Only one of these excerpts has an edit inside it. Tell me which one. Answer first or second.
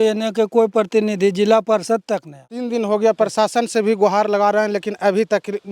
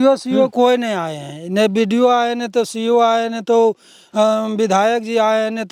first